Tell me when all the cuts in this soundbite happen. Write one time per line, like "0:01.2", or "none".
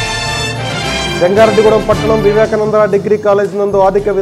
0:01.0

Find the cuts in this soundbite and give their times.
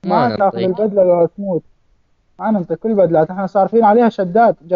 none

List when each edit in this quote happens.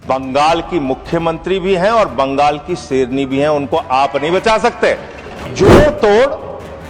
0:05.4

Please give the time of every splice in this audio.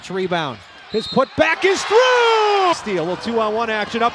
0:02.7

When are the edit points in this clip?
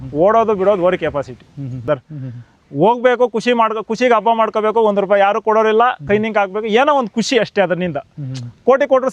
0:01.9

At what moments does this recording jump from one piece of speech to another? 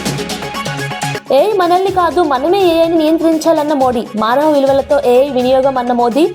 0:01.2

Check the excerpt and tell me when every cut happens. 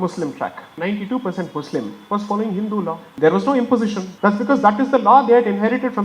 0:00.8
0:03.1
0:04.1

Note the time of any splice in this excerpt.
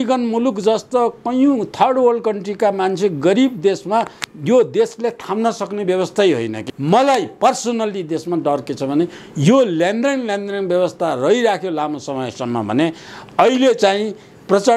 0:06.6

